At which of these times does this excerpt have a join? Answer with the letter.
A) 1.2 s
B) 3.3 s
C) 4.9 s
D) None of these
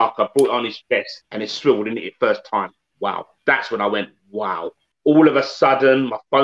C